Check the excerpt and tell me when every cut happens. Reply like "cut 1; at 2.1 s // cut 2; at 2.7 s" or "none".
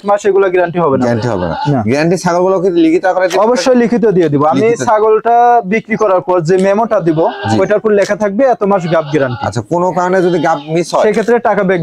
none